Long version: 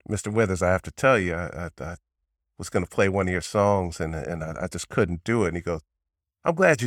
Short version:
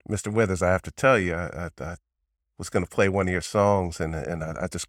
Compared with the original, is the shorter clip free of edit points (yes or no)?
yes